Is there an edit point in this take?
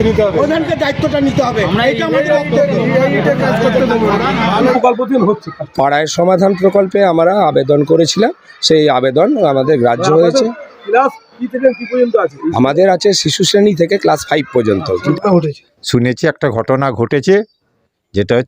yes; 2 cuts; at 4.7 s, 15.1 s

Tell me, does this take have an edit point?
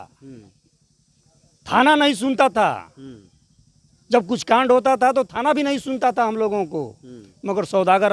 no; 0 cuts

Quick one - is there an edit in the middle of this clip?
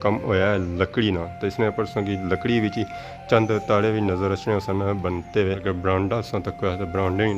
yes; 1 cut; at 5.6 s

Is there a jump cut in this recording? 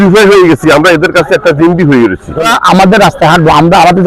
no; 0 cuts

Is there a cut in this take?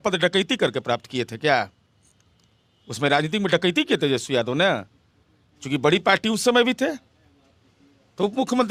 no; 0 cuts

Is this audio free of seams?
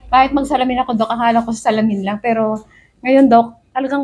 yes; 0 cuts

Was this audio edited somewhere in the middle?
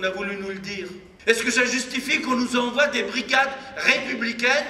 yes; 1 cut; at 1.1 s

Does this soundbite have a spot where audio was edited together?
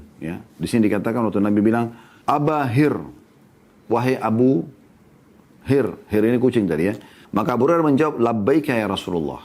yes; 2 cuts; at 2.1 s, 7.1 s

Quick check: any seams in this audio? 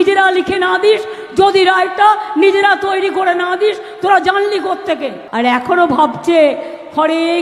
yes; 1 cut; at 5.2 s

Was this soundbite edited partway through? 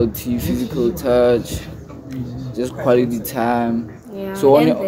no; 0 cuts

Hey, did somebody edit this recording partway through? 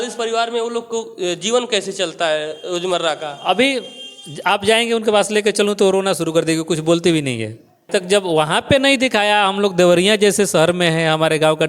yes; 1 cut; at 7.9 s

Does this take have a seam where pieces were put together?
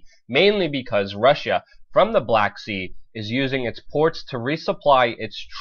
yes; 1 cut; at 2.6 s

